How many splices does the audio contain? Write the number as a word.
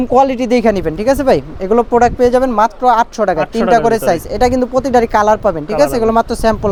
zero